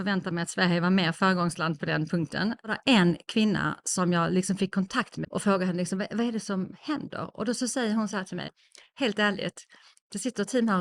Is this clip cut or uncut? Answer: cut